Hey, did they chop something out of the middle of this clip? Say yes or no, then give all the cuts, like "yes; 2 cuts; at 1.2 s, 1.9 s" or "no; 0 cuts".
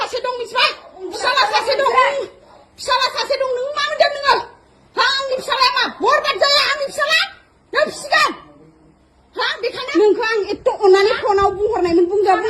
yes; 1 cut; at 9.9 s